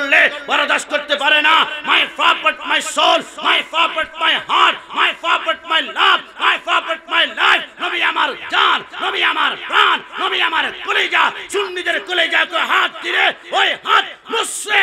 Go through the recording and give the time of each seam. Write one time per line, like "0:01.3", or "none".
none